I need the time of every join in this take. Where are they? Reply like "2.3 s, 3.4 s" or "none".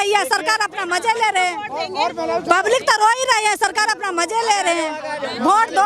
none